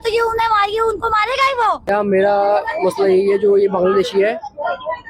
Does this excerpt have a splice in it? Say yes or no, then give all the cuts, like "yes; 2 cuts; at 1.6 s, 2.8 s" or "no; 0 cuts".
yes; 1 cut; at 1.9 s